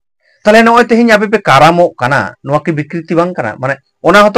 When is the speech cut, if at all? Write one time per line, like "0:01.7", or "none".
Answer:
none

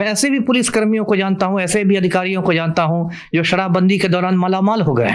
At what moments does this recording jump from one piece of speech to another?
none

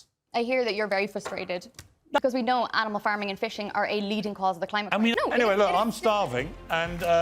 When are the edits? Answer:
0:02.2
0:05.1

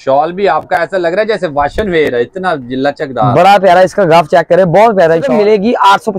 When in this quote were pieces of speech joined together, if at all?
0:05.3

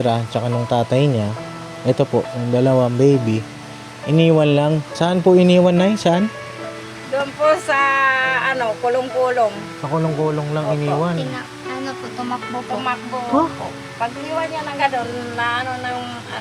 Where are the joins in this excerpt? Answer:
0:04.9

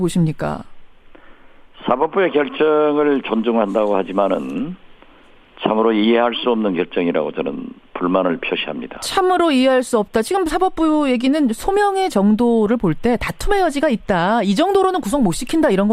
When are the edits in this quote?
0:12.4

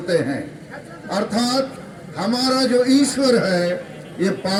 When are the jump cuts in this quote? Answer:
none

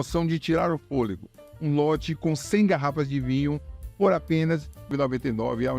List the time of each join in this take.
0:04.9

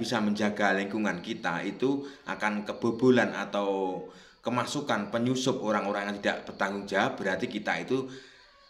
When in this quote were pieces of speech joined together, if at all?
none

